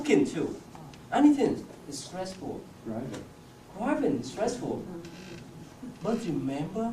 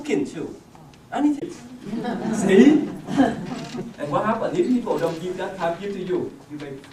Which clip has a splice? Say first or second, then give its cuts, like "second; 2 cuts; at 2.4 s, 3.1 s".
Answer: first; 1 cut; at 1.4 s